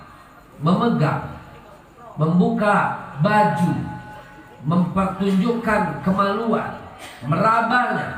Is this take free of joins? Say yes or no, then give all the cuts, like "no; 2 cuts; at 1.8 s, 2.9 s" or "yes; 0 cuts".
yes; 0 cuts